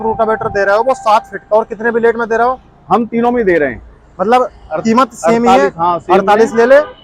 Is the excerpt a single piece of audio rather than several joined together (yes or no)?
yes